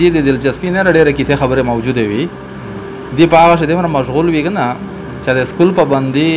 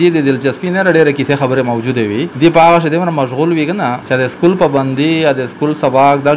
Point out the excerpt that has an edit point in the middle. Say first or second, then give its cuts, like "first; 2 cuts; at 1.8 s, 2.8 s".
second; 2 cuts; at 2.3 s, 4.0 s